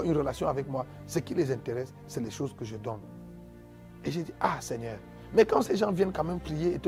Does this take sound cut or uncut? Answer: uncut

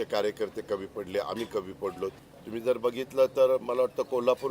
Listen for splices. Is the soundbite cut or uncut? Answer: cut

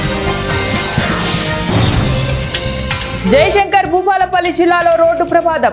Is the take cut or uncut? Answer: cut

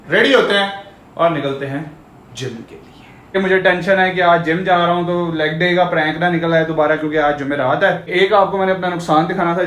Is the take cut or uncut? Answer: cut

